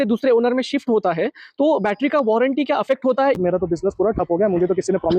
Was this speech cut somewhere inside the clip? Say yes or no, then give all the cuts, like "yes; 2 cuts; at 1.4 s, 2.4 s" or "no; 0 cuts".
yes; 1 cut; at 3.4 s